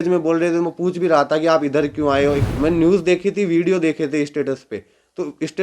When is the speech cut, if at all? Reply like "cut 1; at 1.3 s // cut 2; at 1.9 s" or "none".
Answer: cut 1; at 2.4 s

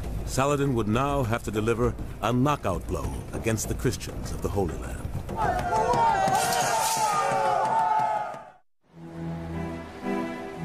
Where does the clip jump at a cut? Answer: cut 1; at 6.9 s

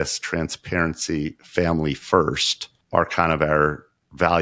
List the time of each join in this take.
cut 1; at 2.7 s

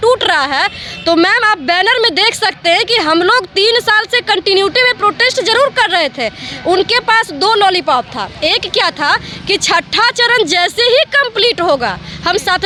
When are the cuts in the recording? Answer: none

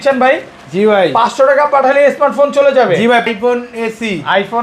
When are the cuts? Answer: cut 1; at 3.2 s

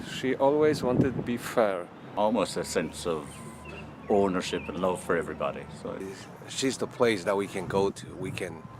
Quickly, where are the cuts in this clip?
cut 1; at 2.0 s // cut 2; at 6.1 s

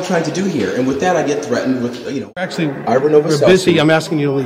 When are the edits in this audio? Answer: cut 1; at 2.4 s

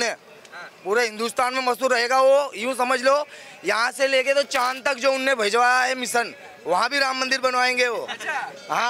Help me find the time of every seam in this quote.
none

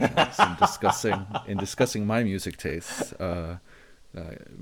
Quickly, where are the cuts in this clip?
cut 1; at 1.0 s

